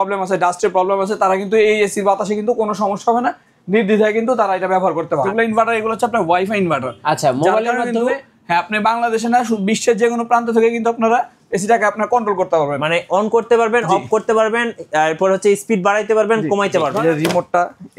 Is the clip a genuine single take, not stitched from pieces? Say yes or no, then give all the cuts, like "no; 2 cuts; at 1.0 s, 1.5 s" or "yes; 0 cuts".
no; 2 cuts; at 5.3 s, 17.0 s